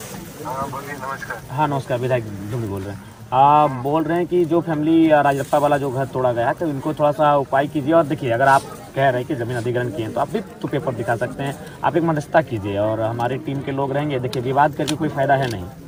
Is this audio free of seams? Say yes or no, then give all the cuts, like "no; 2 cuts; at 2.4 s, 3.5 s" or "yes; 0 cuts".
yes; 0 cuts